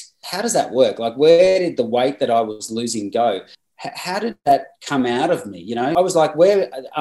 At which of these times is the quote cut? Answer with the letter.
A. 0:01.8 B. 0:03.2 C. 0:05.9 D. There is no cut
C